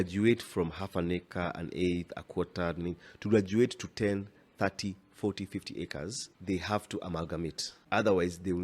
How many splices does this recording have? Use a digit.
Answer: 2